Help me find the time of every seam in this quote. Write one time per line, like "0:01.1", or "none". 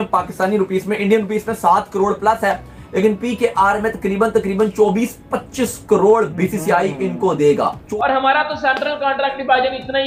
0:07.8